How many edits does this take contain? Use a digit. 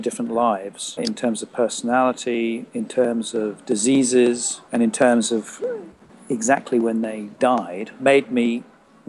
4